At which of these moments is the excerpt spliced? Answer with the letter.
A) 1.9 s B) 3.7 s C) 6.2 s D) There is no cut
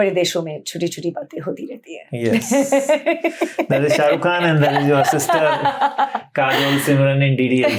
D